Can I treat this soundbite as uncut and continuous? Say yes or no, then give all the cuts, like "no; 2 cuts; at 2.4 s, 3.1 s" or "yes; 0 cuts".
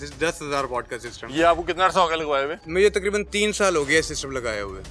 yes; 0 cuts